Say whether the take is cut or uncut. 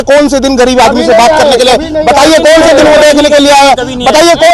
uncut